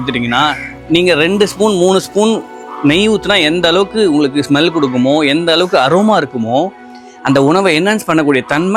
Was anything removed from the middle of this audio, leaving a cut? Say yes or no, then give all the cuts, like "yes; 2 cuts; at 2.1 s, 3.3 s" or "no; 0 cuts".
no; 0 cuts